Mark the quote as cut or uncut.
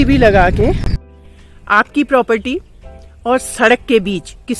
cut